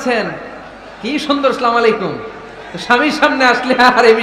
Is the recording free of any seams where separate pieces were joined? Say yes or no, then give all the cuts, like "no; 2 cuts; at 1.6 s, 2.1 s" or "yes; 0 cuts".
yes; 0 cuts